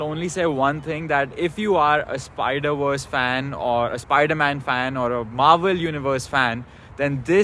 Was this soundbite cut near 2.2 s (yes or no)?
no